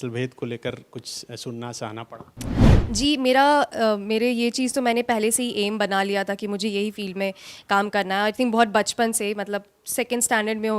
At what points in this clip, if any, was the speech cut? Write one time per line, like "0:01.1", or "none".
0:02.7